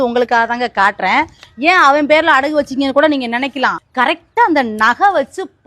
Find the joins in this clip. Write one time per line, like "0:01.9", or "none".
0:03.8